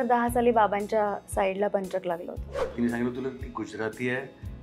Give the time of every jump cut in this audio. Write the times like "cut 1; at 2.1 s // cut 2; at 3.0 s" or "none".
cut 1; at 2.7 s